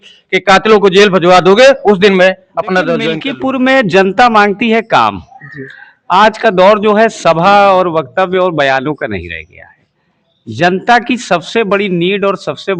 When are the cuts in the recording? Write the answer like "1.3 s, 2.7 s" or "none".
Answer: 3.2 s